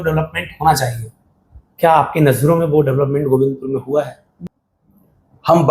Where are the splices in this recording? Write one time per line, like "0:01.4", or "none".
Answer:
0:04.2